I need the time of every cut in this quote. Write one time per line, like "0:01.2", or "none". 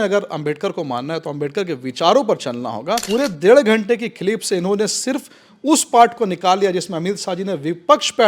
0:03.0